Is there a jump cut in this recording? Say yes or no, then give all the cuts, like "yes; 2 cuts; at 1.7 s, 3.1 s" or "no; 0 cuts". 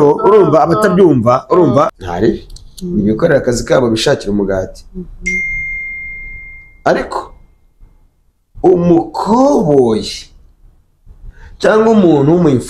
yes; 1 cut; at 2.0 s